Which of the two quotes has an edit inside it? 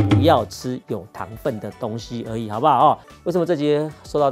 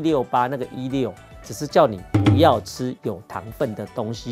first; 1 cut; at 3.1 s

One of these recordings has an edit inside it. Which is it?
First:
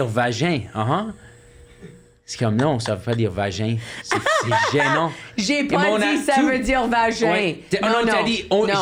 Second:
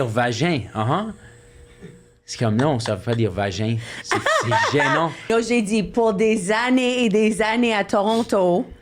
second; 1 cut; at 5.2 s

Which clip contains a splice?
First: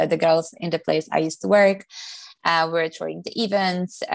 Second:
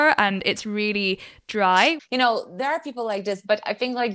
second; 1 cut; at 2.0 s

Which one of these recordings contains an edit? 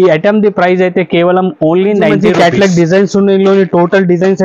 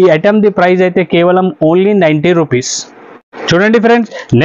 first; 1 cut; at 2.1 s

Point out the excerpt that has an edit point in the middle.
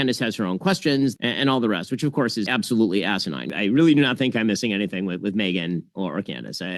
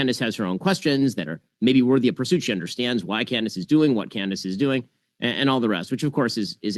first; 3 cuts; at 1.2 s, 2.5 s, 3.5 s

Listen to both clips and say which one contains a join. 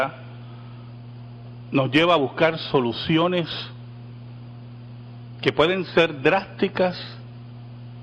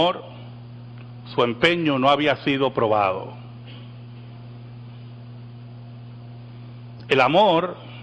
second; 1 cut; at 6.1 s

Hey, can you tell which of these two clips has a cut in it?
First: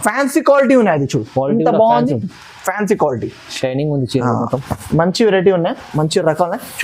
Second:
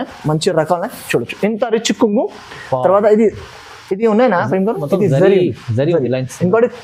first; 1 cut; at 4.7 s

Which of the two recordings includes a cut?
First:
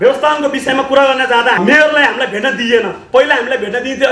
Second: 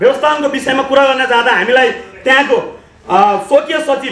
first; 1 cut; at 1.6 s

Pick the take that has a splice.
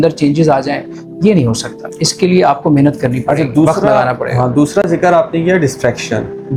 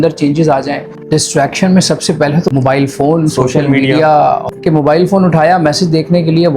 second; 3 cuts; at 0.9 s, 2.5 s, 4.5 s

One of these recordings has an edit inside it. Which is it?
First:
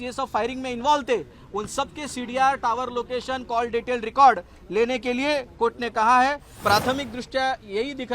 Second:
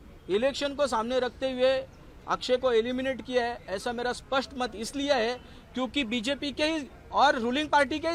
first; 1 cut; at 6.5 s

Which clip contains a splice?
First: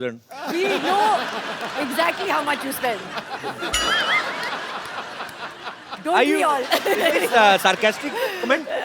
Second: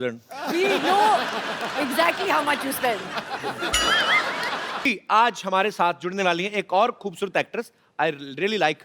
second; 1 cut; at 4.9 s

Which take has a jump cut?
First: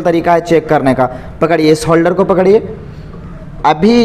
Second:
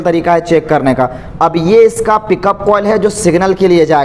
second; 1 cut; at 1.2 s

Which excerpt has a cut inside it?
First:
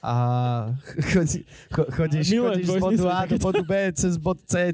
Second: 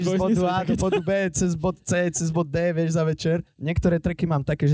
second; 1 cut; at 3.5 s

